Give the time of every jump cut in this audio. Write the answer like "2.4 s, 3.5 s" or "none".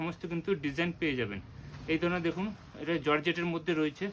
none